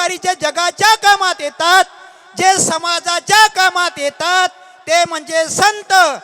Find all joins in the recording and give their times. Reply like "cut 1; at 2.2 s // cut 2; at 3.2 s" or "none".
none